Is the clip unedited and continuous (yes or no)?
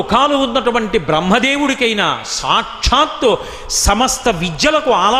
yes